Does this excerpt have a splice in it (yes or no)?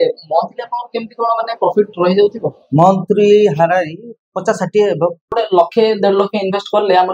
yes